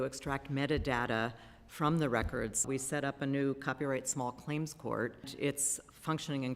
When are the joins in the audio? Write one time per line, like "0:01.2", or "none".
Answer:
0:02.7
0:05.3